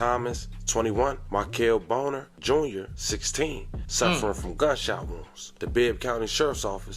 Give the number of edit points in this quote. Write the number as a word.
zero